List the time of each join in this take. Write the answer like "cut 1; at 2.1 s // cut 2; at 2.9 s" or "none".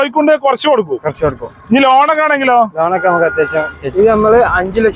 cut 1; at 3.9 s